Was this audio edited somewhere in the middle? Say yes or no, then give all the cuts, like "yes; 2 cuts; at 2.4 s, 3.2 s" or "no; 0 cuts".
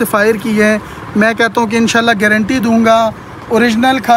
no; 0 cuts